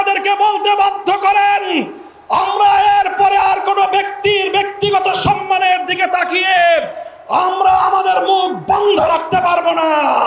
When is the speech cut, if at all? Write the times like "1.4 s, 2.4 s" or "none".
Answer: none